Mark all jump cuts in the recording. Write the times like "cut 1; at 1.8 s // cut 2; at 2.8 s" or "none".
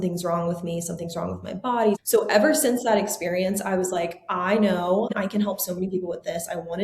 cut 1; at 2.0 s // cut 2; at 5.2 s